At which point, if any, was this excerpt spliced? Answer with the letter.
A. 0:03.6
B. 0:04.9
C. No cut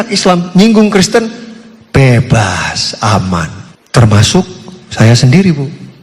A